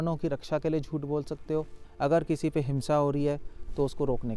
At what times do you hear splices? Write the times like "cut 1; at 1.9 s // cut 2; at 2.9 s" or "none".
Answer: cut 1; at 1.8 s